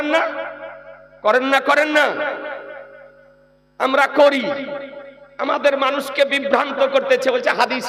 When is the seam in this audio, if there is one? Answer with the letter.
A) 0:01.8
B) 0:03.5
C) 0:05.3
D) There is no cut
D